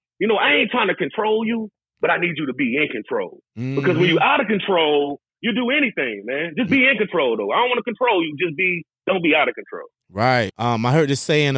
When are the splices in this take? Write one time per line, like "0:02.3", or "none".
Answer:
0:10.5